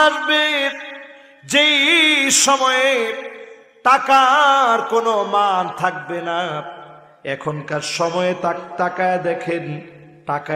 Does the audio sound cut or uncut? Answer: uncut